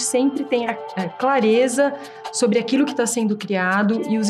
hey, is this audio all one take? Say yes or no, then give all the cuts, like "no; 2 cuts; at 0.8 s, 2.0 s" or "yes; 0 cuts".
yes; 0 cuts